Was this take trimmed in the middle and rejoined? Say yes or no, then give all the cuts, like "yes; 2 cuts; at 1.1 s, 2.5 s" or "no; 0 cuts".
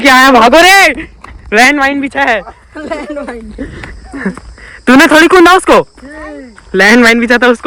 no; 0 cuts